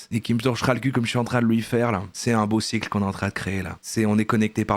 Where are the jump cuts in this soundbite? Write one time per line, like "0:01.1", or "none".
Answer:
none